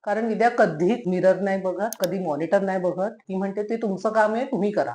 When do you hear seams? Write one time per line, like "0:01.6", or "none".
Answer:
0:01.0
0:02.0
0:03.2